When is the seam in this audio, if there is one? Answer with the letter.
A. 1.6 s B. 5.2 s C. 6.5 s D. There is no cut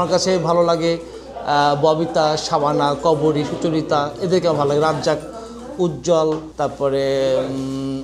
C